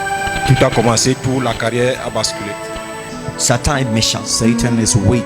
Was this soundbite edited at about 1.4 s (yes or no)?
no